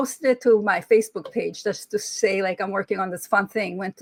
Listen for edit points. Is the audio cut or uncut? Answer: uncut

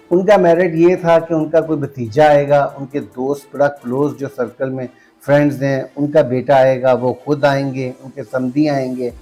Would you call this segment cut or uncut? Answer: uncut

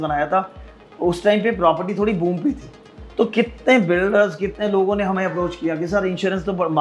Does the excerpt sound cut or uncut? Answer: uncut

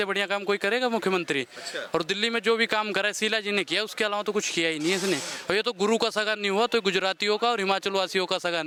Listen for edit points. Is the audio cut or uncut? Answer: uncut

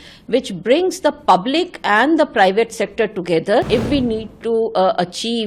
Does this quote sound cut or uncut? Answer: cut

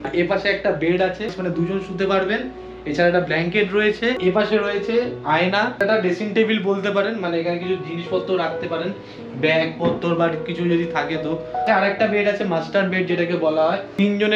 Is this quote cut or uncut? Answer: uncut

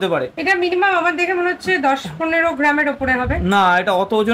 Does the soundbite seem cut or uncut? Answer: uncut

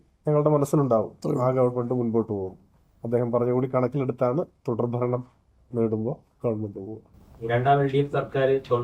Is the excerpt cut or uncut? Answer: uncut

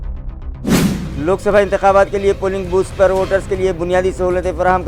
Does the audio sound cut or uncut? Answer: cut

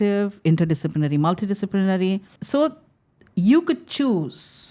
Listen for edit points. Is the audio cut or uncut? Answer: cut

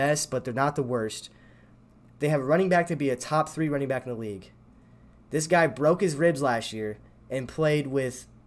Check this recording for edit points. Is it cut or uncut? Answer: uncut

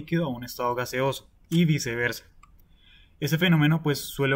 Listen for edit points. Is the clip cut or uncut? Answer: uncut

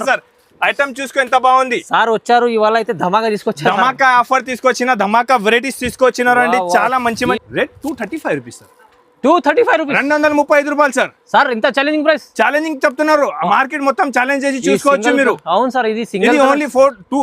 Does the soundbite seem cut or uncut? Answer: cut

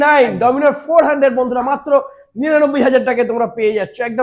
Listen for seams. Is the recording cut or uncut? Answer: uncut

